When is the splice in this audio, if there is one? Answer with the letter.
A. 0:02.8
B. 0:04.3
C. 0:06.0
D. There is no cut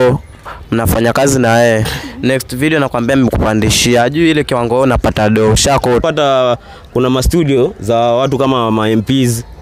C